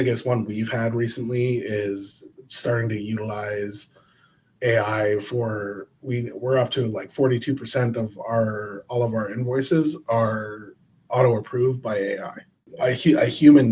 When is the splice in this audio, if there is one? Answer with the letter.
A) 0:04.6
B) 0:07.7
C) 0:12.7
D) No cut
C